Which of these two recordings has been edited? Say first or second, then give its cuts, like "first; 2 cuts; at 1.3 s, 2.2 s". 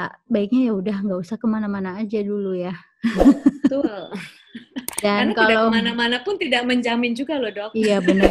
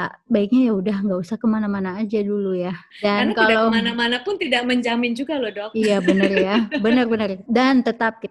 second; 2 cuts; at 2.8 s, 7.4 s